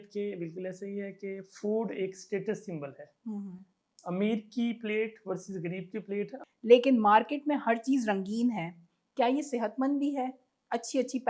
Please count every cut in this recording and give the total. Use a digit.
1